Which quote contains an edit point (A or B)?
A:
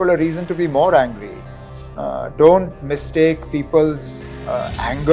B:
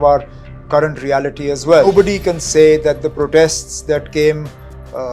B